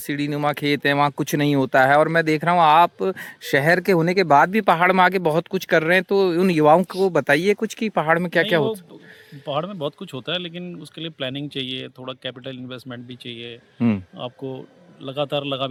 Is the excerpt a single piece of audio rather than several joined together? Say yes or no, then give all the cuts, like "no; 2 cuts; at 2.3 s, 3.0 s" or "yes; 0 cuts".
yes; 0 cuts